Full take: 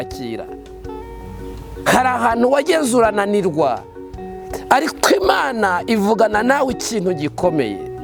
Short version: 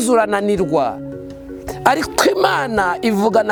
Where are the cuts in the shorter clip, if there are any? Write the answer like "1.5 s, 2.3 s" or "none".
none